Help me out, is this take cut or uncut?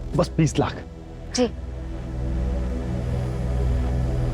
uncut